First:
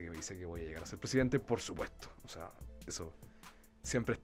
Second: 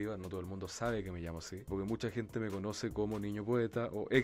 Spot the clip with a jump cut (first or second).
second